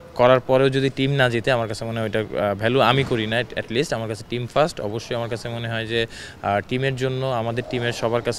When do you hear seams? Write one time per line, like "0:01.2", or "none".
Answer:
none